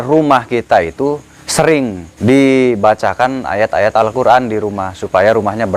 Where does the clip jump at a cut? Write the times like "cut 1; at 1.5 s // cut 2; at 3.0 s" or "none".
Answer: cut 1; at 1.6 s